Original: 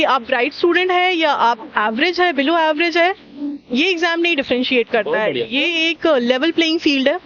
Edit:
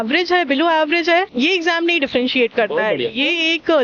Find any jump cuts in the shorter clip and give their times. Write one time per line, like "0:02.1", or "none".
0:01.3